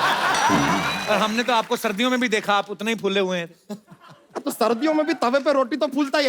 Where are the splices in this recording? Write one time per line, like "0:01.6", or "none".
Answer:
0:01.0